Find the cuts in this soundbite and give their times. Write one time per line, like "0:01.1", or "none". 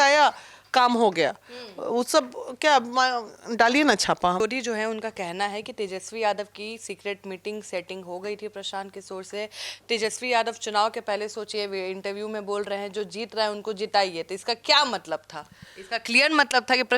0:04.4